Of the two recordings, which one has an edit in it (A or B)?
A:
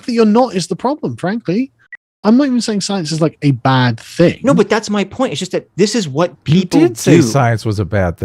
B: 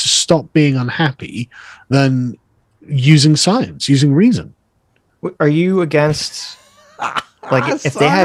A